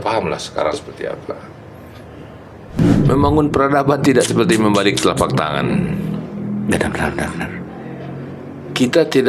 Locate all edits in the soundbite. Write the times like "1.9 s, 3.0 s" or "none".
2.8 s